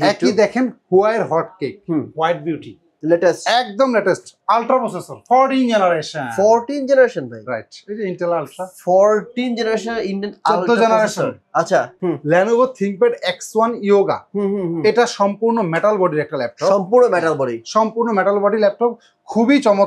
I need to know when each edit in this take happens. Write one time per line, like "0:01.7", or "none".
0:02.9
0:12.0

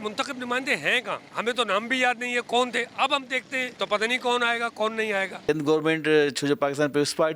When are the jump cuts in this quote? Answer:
0:01.3
0:03.7
0:05.4

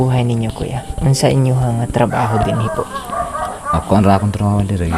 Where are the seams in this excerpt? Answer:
none

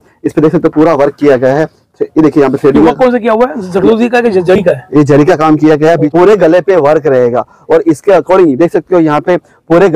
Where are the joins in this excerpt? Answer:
0:06.1

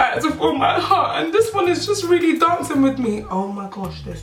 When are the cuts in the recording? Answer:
none

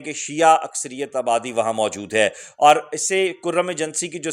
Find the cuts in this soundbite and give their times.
none

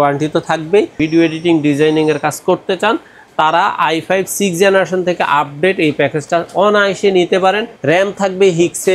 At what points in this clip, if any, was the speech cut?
0:00.9
0:07.7

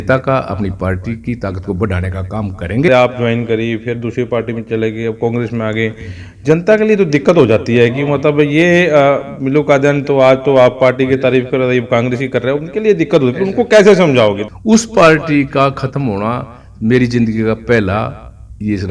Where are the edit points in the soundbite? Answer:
0:02.9
0:14.4

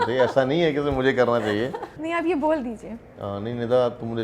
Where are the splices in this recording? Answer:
0:02.0

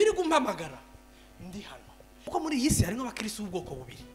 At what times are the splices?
0:02.3

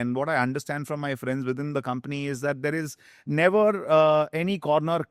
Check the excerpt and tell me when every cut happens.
none

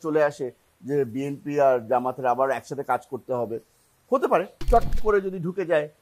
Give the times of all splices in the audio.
0:04.6

